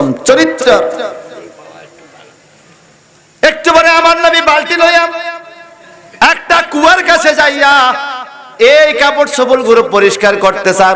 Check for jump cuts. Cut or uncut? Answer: uncut